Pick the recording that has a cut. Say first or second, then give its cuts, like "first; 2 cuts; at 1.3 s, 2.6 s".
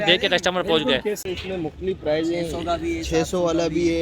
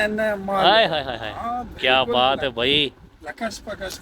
first; 1 cut; at 1.2 s